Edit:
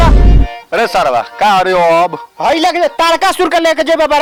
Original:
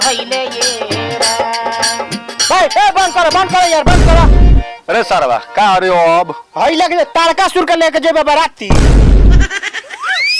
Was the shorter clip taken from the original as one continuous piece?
yes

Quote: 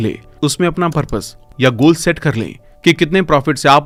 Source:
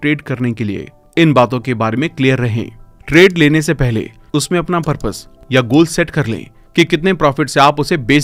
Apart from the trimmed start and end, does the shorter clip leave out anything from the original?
no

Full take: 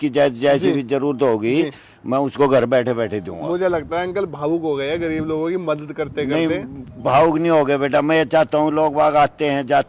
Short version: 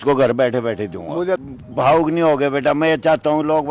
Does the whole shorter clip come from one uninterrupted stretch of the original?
no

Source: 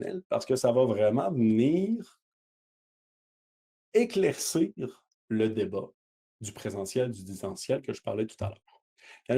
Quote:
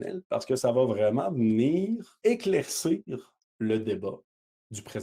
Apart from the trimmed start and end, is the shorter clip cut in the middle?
yes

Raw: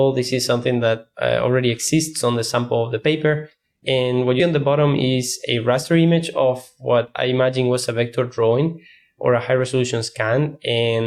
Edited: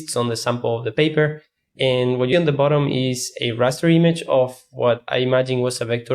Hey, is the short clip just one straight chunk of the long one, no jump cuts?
yes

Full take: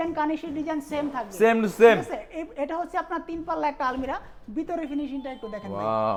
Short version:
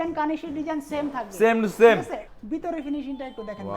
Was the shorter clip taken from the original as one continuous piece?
no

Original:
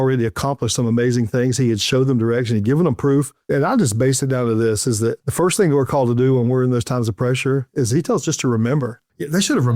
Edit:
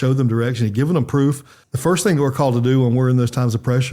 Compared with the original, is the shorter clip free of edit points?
no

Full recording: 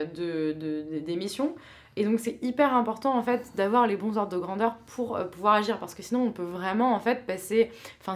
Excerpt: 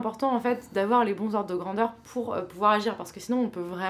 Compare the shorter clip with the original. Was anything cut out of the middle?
no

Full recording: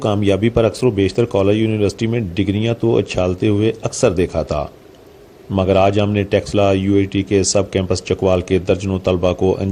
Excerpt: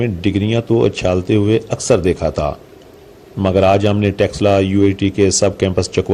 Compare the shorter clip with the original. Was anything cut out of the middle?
no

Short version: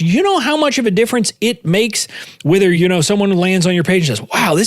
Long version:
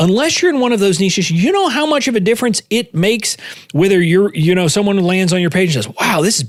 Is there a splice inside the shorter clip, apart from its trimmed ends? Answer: yes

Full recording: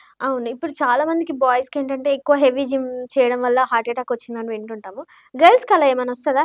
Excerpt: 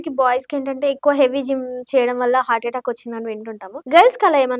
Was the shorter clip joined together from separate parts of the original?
yes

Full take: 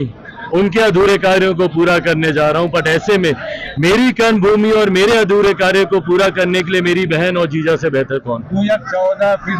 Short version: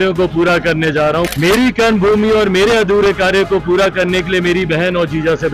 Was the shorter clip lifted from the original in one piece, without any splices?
no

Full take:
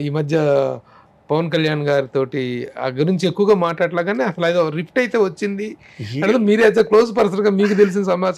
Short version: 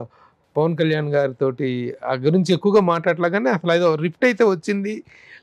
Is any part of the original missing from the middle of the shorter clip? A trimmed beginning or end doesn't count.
no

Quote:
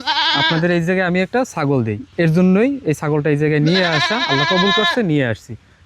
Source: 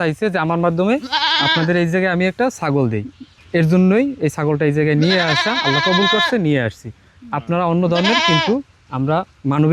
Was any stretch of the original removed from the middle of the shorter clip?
yes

